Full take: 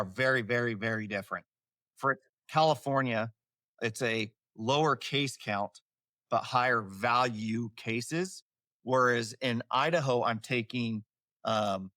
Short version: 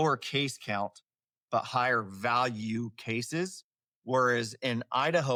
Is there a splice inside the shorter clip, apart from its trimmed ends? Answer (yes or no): no